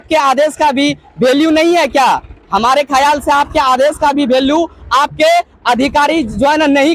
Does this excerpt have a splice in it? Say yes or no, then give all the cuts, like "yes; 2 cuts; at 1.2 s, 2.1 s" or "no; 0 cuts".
no; 0 cuts